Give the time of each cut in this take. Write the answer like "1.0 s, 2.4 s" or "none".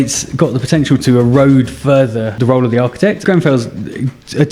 2.3 s, 3.2 s